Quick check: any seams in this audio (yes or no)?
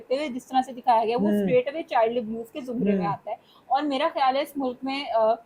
no